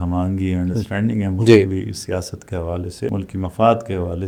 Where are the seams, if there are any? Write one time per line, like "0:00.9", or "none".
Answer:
none